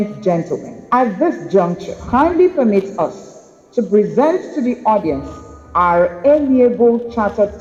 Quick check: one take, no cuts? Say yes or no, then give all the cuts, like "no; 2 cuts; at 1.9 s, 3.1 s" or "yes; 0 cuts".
yes; 0 cuts